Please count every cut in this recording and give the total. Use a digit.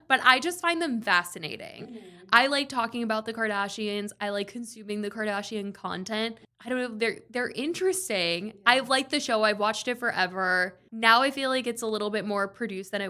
2